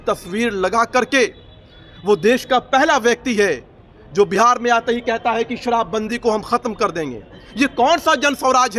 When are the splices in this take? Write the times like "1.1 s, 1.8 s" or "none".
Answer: none

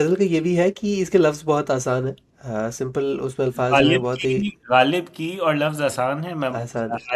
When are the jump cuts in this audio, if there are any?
none

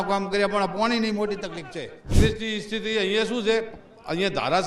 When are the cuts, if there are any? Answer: 2.2 s

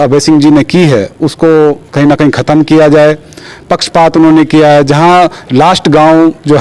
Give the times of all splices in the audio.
none

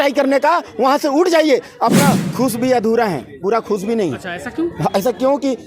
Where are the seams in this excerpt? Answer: 2.2 s

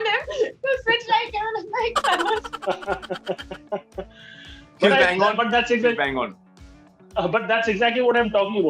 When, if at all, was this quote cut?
none

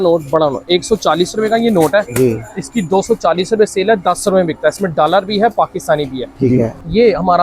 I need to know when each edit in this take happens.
6.5 s

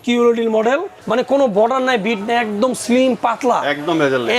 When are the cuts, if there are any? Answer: 1.0 s

